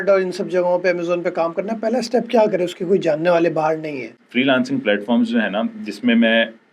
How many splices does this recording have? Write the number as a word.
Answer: one